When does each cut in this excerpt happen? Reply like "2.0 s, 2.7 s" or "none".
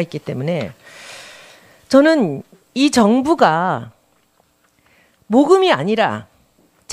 5.7 s